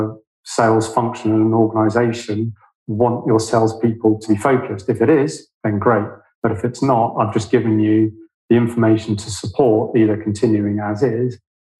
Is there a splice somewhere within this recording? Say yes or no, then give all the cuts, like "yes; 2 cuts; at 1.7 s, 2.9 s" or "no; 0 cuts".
yes; 1 cut; at 4.2 s